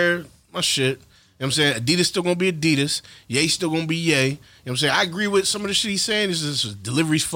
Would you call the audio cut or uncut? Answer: uncut